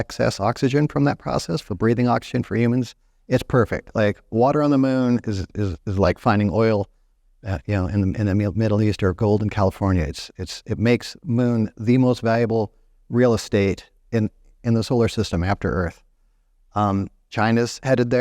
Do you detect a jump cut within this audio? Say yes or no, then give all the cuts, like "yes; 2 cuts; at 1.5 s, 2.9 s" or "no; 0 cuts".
no; 0 cuts